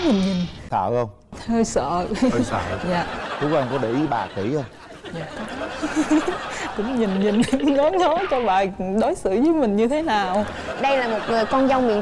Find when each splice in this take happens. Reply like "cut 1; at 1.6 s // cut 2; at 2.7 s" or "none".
none